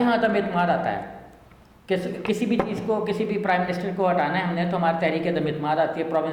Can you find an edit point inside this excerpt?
no; 0 cuts

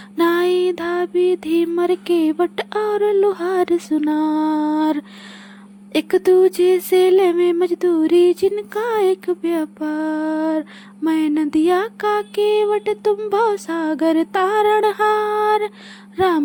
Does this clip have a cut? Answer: no; 0 cuts

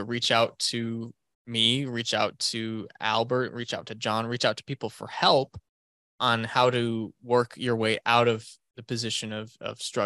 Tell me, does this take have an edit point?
no; 0 cuts

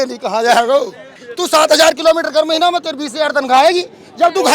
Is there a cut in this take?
yes; 1 cut; at 1.2 s

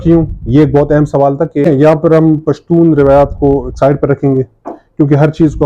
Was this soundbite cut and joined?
yes; 1 cut; at 1.6 s

